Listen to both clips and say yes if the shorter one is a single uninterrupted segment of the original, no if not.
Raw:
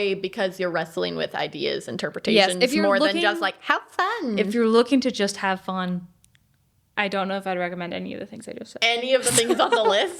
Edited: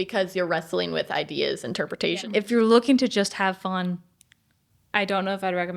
no